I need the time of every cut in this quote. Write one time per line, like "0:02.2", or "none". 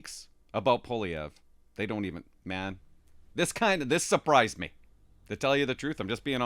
none